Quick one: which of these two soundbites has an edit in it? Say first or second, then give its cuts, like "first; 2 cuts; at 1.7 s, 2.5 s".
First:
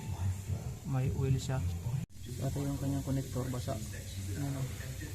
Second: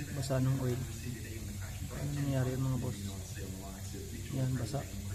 first; 1 cut; at 2.0 s